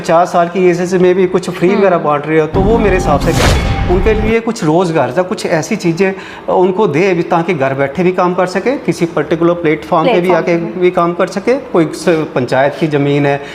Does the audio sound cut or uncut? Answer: cut